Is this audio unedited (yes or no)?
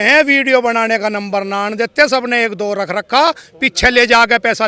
yes